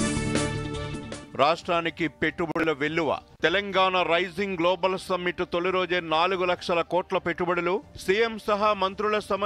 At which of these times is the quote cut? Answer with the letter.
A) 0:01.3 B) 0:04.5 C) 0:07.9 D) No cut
A